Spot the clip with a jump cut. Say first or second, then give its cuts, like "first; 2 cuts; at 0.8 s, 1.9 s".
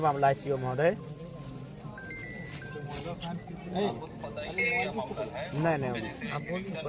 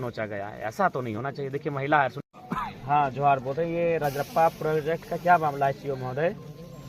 second; 1 cut; at 2.2 s